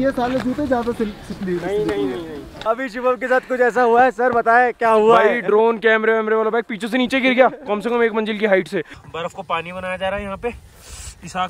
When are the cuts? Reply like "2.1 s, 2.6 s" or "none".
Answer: 2.6 s, 9.0 s